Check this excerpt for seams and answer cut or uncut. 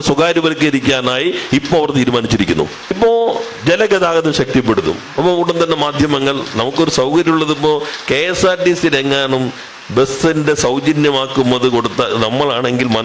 cut